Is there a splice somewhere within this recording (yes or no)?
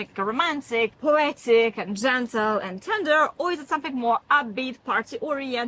no